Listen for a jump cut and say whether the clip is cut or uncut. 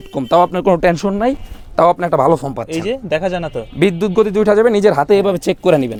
uncut